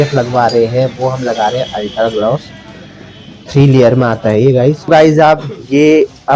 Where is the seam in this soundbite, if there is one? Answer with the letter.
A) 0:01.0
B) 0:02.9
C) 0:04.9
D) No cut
C